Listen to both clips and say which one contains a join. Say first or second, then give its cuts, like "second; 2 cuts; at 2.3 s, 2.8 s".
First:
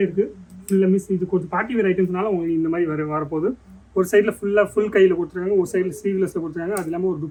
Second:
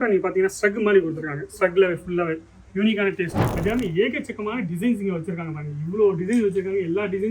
second; 1 cut; at 3.4 s